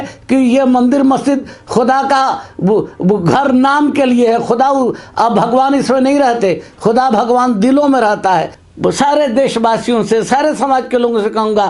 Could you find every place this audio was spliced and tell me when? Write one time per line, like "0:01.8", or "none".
0:08.6